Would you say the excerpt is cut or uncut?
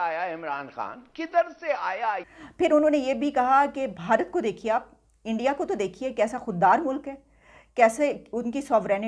cut